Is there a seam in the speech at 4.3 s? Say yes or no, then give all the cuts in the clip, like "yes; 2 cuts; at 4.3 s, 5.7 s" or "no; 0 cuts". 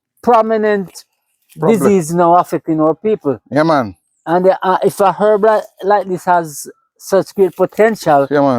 no; 0 cuts